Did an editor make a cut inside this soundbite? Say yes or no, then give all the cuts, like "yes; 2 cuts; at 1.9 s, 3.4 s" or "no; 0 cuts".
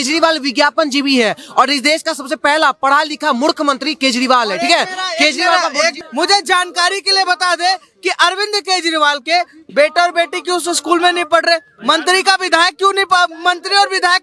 yes; 1 cut; at 5.9 s